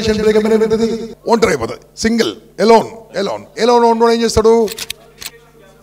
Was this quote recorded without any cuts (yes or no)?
no